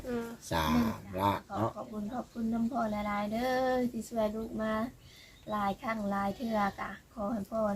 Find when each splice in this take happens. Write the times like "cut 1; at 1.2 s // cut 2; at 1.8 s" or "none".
cut 1; at 1.8 s